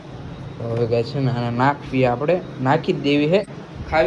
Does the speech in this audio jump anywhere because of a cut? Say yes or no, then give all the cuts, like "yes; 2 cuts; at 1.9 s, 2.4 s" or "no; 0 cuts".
no; 0 cuts